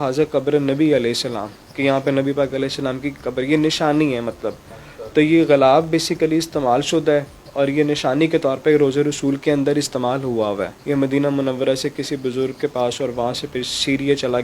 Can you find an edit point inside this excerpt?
no; 0 cuts

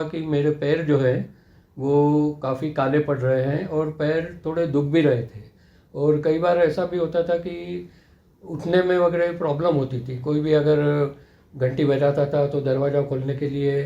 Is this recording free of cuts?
yes; 0 cuts

